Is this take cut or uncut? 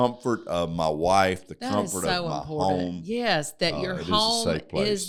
uncut